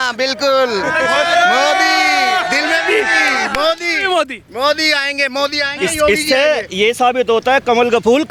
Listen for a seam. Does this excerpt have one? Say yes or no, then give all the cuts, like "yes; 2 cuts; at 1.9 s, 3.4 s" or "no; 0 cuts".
no; 0 cuts